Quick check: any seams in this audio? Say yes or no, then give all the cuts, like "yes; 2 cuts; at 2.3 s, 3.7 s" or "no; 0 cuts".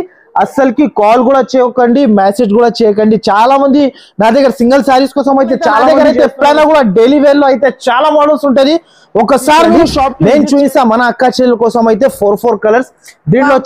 yes; 2 cuts; at 5.8 s, 10.1 s